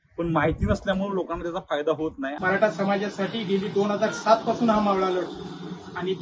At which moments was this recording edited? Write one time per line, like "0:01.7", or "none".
0:02.3